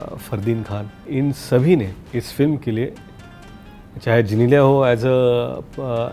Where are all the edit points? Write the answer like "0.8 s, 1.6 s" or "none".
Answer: 1.0 s, 2.0 s